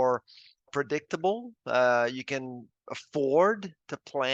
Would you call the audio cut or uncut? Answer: uncut